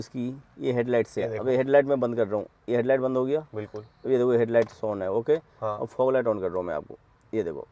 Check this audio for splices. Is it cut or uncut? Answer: uncut